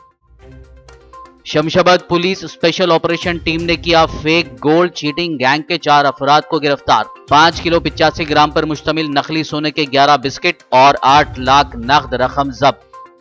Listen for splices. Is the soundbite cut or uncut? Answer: uncut